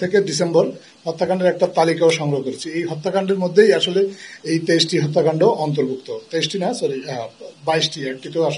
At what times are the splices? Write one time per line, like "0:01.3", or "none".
none